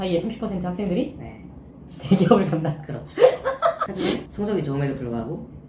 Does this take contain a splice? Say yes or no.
no